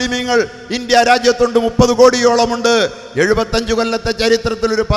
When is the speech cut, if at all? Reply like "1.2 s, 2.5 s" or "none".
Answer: none